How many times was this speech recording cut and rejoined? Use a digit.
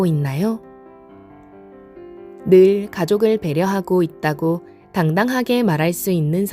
0